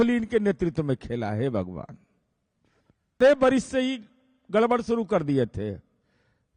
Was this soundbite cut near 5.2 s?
no; 1 cut; at 3.2 s

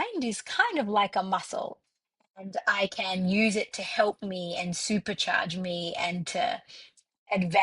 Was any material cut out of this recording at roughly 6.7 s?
no; 1 cut; at 1.8 s

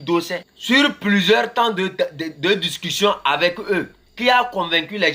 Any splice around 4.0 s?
yes; 1 cut; at 4.0 s

